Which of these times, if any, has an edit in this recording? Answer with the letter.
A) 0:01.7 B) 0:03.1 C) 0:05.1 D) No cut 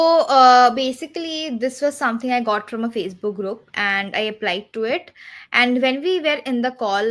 D